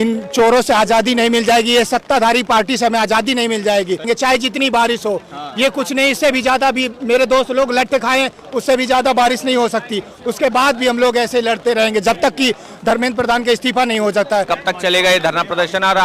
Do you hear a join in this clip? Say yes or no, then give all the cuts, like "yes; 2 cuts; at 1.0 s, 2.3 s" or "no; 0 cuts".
yes; 2 cuts; at 4.0 s, 14.5 s